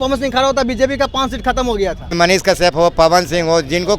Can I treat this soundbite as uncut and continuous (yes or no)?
no